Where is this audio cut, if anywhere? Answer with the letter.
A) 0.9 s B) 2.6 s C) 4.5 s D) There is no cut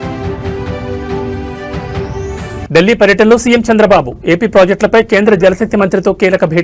B